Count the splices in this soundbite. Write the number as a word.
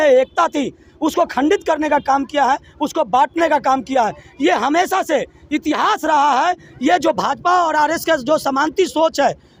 zero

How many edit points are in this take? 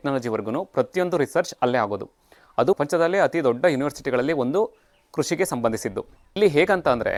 zero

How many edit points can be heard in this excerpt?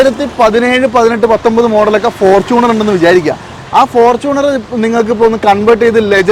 zero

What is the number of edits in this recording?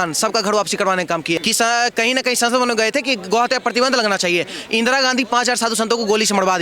one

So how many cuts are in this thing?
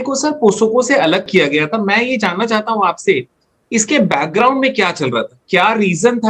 one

